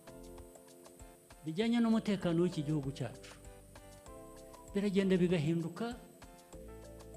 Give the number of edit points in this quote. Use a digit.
3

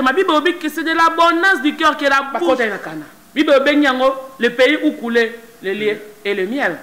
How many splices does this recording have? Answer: 1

